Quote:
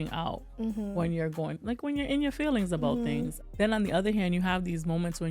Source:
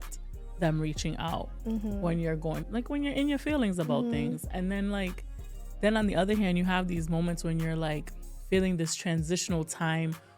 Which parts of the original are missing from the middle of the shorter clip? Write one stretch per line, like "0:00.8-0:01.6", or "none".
0:04.5-0:05.6